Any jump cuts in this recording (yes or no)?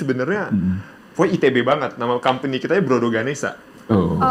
no